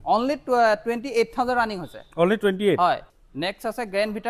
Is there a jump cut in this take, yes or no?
yes